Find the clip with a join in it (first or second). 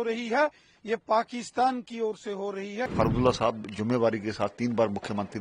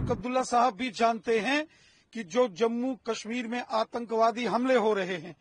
first